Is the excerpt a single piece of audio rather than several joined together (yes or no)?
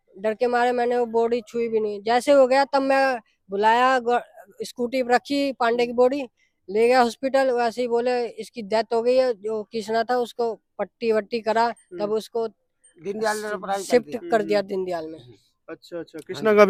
yes